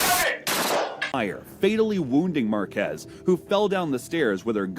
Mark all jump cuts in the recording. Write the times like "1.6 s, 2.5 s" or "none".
1.1 s